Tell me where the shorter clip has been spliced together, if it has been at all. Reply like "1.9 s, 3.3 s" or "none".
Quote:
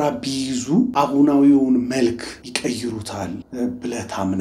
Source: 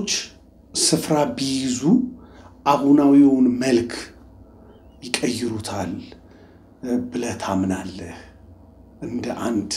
0.9 s, 2.4 s, 3.5 s